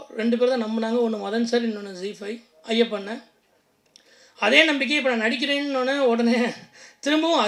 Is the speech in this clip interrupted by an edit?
no; 0 cuts

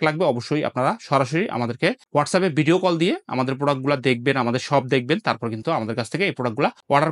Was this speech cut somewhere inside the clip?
no; 0 cuts

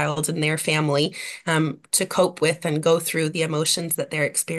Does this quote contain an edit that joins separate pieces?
no; 0 cuts

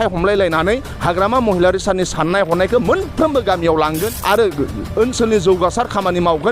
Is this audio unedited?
no; 1 cut; at 4.1 s

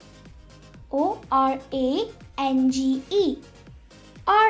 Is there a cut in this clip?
no; 0 cuts

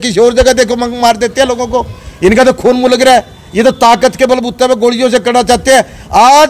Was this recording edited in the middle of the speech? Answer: no; 0 cuts

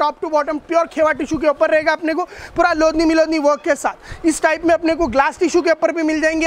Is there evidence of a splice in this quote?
no; 0 cuts

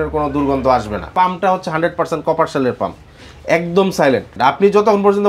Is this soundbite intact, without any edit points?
no; 2 cuts; at 1.0 s, 4.3 s

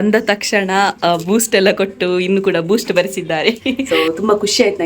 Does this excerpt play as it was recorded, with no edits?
no; 1 cut; at 3.7 s

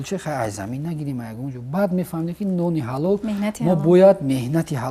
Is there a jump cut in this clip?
no; 0 cuts

